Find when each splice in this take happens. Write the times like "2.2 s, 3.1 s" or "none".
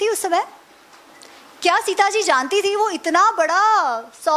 none